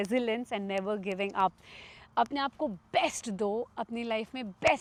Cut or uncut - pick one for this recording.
uncut